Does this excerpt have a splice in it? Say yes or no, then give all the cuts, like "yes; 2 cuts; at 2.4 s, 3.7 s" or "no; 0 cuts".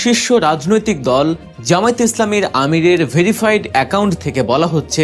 yes; 1 cut; at 1.5 s